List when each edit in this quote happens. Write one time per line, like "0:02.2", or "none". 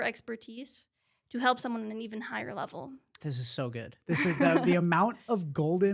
0:03.1